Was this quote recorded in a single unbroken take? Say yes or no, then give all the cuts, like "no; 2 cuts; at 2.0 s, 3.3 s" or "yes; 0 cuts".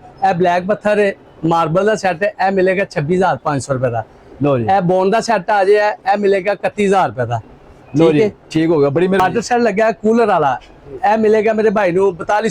no; 1 cut; at 9.2 s